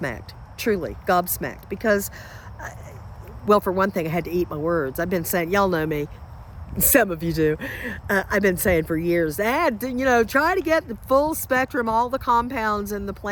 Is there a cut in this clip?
no; 0 cuts

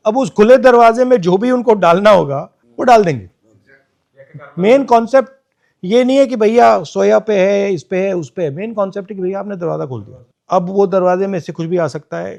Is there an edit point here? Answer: no; 0 cuts

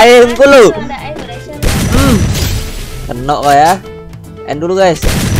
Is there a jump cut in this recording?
no; 0 cuts

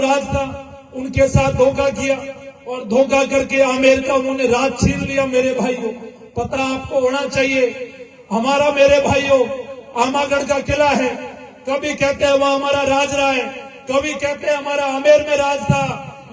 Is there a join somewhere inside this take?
no; 0 cuts

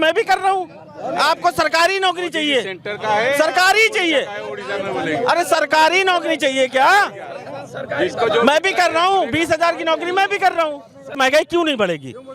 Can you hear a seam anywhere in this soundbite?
yes; 1 cut; at 11.2 s

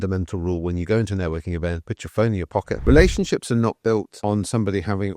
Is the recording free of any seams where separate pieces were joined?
no; 1 cut; at 2.8 s

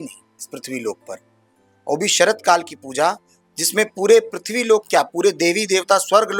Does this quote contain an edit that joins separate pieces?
no; 0 cuts

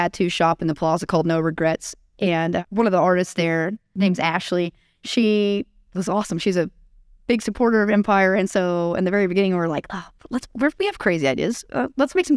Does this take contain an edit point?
yes; 2 cuts; at 2.6 s, 3.9 s

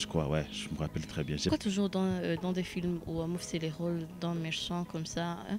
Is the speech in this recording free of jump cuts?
no; 1 cut; at 1.5 s

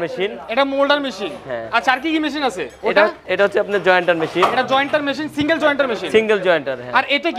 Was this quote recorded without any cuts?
yes; 0 cuts

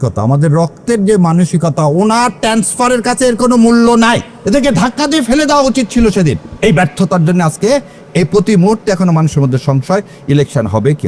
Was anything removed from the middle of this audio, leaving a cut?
yes; 2 cuts; at 4.3 s, 6.5 s

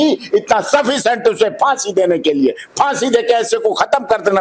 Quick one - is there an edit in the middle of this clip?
no; 0 cuts

